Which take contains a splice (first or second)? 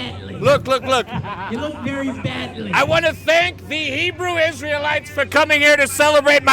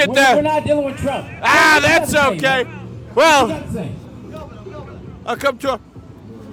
first